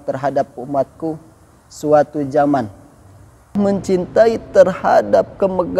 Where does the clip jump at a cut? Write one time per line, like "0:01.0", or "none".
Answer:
0:03.5